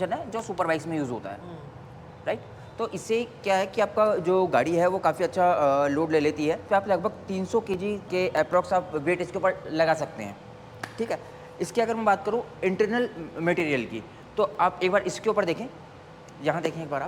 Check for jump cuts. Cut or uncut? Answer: uncut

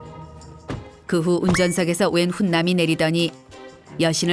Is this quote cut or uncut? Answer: uncut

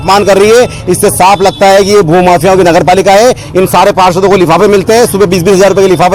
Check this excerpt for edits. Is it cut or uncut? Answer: uncut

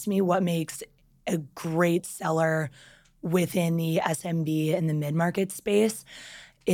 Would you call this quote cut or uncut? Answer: uncut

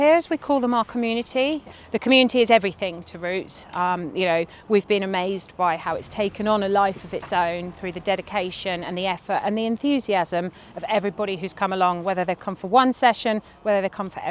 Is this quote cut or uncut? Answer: cut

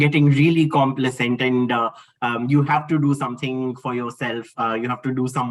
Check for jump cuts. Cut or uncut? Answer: uncut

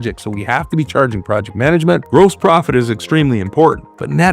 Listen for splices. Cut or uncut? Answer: cut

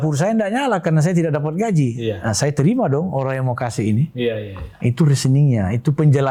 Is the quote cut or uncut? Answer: uncut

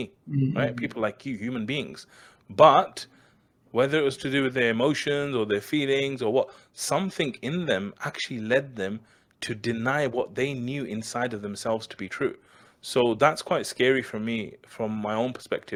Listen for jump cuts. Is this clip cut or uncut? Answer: uncut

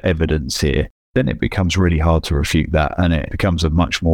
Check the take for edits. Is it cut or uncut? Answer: cut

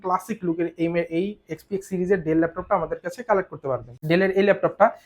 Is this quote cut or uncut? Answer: cut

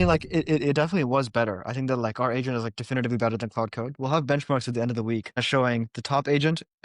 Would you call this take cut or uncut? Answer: cut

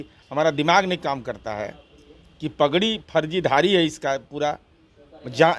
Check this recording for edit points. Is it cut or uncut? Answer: uncut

